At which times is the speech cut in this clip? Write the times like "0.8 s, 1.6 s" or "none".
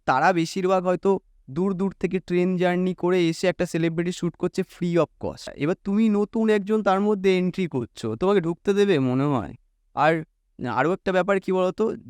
5.5 s